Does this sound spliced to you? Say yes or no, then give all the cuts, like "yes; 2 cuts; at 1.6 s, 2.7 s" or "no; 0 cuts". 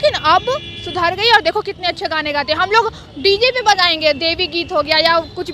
no; 0 cuts